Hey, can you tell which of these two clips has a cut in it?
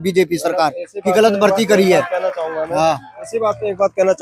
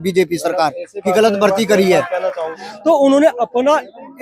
second; 1 cut; at 2.6 s

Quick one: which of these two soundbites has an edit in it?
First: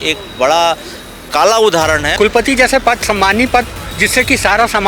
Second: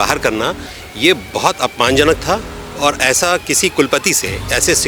first; 1 cut; at 2.1 s

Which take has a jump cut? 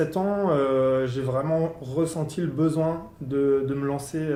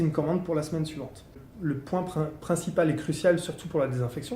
second; 1 cut; at 1.5 s

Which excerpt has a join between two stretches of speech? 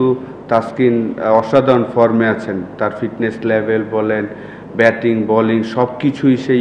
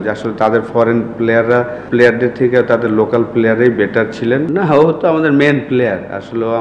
second; 2 cuts; at 1.8 s, 4.5 s

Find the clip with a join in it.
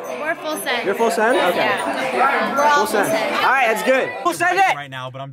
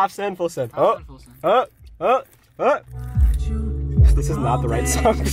first; 1 cut; at 4.2 s

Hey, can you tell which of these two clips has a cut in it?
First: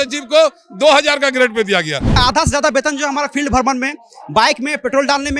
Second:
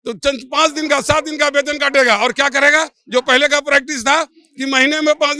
first; 1 cut; at 2.2 s

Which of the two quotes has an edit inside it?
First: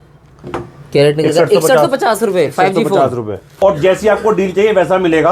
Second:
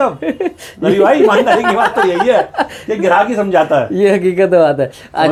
first; 1 cut; at 3.4 s

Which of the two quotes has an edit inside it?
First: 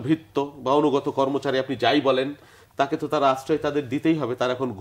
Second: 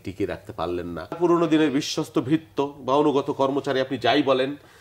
second; 1 cut; at 1.2 s

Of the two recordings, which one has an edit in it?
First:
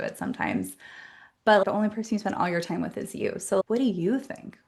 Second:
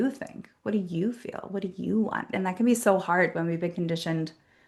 first; 1 cut; at 1.7 s

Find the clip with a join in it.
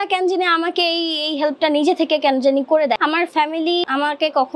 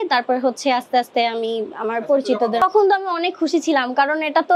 first; 1 cut; at 3.0 s

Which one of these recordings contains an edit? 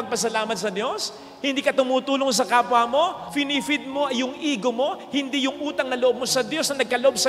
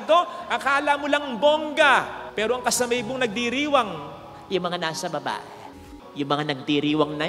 second; 1 cut; at 5.8 s

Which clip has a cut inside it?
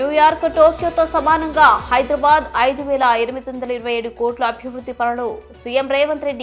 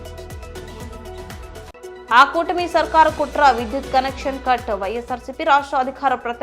second; 1 cut; at 1.3 s

